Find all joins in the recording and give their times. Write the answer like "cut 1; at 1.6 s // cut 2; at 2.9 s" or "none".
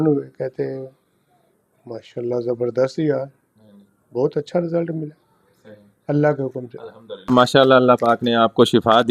cut 1; at 7.3 s